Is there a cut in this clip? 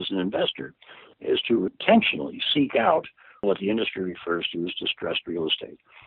yes; 1 cut; at 3.4 s

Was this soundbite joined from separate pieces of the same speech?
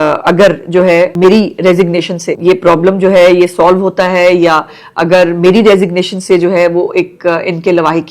yes; 2 cuts; at 1.1 s, 2.3 s

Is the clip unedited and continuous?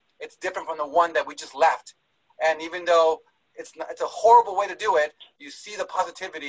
yes; 0 cuts

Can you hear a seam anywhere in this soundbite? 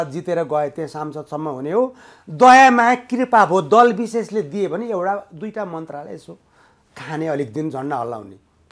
no; 0 cuts

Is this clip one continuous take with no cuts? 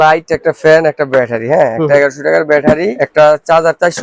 no; 1 cut; at 3.0 s

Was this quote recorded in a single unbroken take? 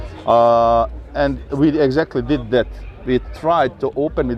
yes; 0 cuts

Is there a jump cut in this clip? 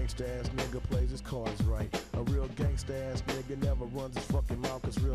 yes; 1 cut; at 3.4 s

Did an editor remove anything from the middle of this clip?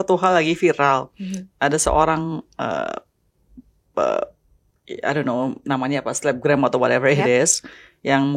no; 0 cuts

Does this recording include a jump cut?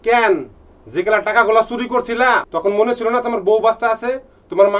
yes; 1 cut; at 2.5 s

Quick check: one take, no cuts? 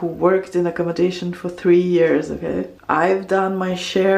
yes; 0 cuts

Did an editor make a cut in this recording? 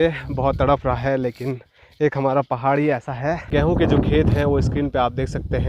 yes; 1 cut; at 3.4 s

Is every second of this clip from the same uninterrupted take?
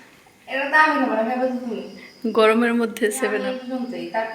no; 1 cut; at 3.4 s

